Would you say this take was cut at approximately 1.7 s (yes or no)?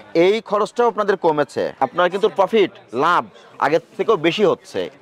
yes